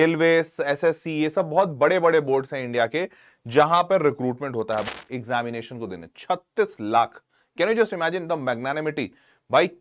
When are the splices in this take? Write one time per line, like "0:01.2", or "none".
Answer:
0:04.8